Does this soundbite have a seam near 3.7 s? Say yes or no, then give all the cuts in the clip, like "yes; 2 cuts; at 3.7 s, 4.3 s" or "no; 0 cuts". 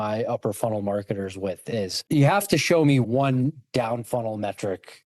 no; 1 cut; at 2.0 s